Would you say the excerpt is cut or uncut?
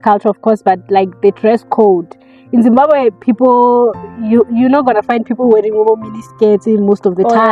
uncut